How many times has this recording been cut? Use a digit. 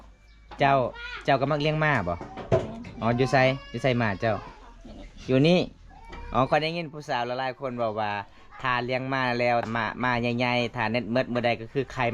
1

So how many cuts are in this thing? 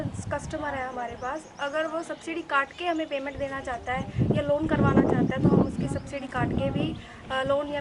0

